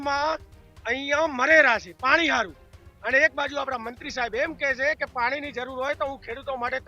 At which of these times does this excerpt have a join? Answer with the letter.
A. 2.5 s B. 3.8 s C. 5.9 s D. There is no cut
D